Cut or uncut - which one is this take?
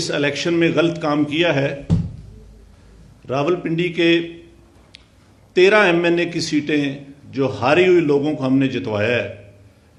uncut